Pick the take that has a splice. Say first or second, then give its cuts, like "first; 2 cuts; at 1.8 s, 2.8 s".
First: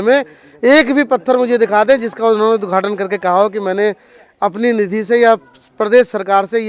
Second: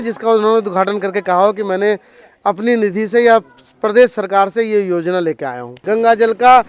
second; 1 cut; at 5.8 s